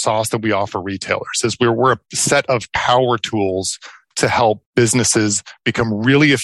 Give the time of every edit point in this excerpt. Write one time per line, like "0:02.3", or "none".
0:04.6